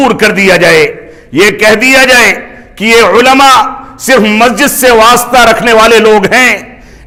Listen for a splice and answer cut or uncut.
uncut